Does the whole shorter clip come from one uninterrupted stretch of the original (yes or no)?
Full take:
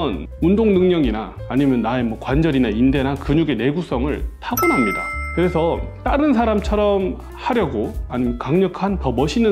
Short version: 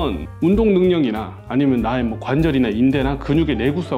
yes